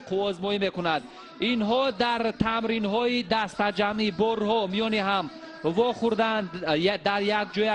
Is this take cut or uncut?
uncut